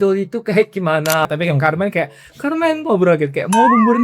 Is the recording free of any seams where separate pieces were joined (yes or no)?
no